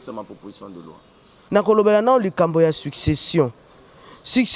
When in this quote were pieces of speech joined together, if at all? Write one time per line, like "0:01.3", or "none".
0:01.3